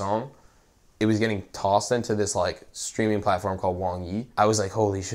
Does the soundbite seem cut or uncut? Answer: cut